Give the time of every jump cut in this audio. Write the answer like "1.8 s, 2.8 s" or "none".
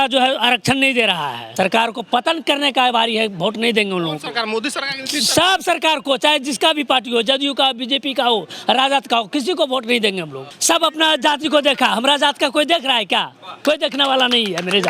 1.5 s, 10.5 s

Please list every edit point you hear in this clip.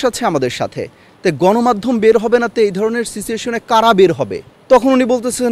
none

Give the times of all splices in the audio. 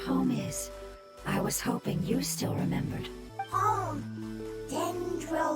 3.2 s

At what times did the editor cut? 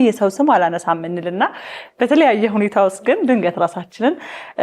none

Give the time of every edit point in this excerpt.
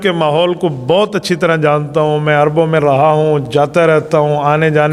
none

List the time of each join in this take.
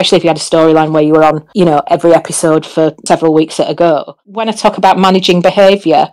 4.2 s

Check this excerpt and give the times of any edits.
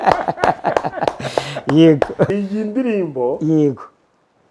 2.3 s

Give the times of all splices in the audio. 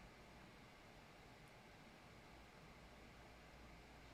none

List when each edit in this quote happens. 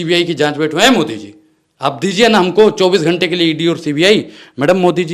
none

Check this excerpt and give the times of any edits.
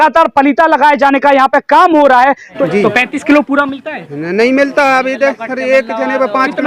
2.6 s

